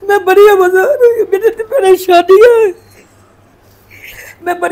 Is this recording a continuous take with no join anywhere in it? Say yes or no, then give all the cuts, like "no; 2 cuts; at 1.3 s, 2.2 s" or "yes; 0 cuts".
yes; 0 cuts